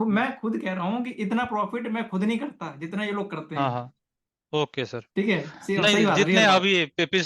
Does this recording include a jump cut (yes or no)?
no